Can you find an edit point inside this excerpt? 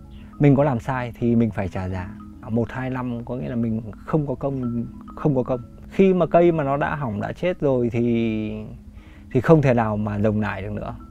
yes; 2 cuts; at 2.3 s, 5.8 s

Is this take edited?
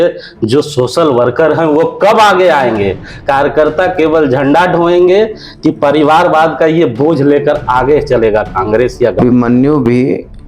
yes; 1 cut; at 9.2 s

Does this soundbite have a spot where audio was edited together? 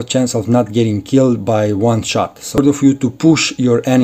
yes; 1 cut; at 2.6 s

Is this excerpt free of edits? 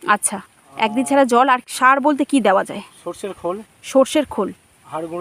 yes; 0 cuts

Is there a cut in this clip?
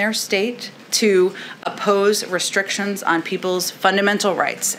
no; 0 cuts

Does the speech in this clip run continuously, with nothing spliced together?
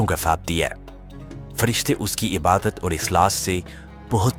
yes; 0 cuts

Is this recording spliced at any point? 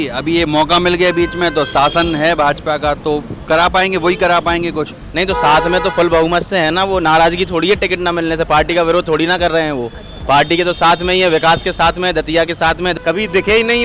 yes; 2 cuts; at 5.0 s, 12.9 s

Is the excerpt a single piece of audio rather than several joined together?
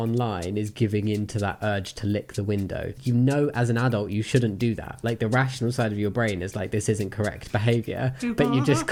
yes; 0 cuts

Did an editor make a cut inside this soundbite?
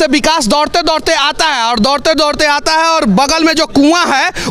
no; 0 cuts

